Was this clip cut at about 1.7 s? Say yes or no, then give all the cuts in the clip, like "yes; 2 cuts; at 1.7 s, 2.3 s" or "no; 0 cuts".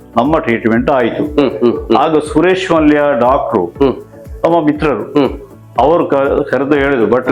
no; 0 cuts